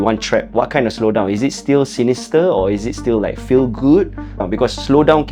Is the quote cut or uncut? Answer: cut